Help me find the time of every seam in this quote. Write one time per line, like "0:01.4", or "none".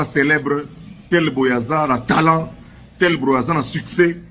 none